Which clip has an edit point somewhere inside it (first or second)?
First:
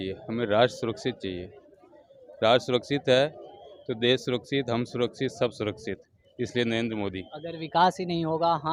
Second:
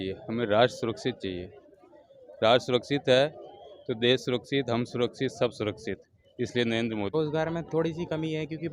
second